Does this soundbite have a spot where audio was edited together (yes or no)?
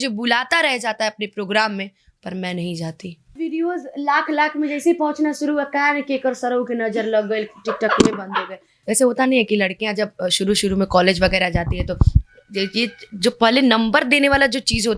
yes